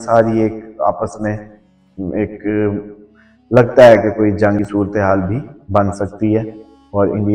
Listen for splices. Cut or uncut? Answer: uncut